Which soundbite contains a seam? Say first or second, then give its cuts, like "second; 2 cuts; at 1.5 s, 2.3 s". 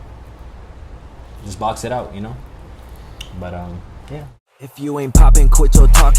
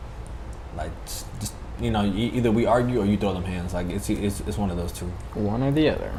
first; 1 cut; at 4.3 s